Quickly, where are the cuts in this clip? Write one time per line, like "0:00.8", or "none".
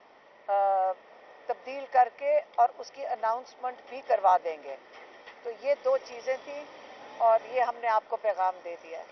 0:05.7